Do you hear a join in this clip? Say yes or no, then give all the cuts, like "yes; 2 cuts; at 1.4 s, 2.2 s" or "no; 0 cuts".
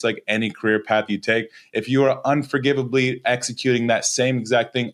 no; 0 cuts